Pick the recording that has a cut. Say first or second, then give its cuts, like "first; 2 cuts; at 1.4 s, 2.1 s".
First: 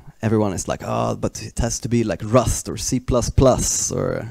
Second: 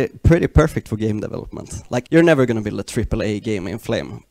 second; 1 cut; at 2.1 s